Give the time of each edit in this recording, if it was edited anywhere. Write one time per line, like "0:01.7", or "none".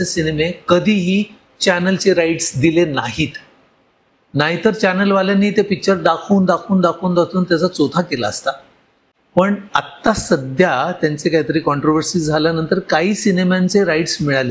none

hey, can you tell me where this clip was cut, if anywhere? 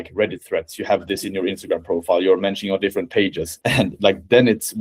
0:03.5

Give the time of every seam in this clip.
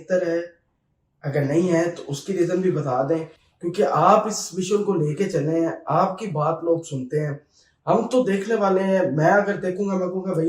none

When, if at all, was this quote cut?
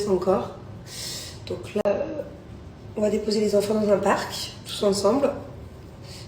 0:01.8

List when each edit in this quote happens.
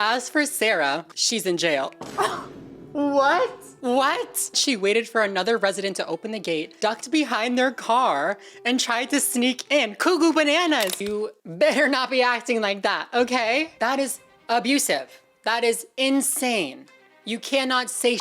0:01.0
0:04.6
0:11.0

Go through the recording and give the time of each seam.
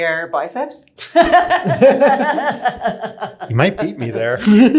none

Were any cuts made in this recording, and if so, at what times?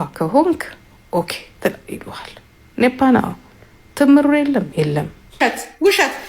0:05.3

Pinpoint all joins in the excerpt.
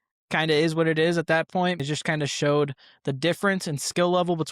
0:01.8

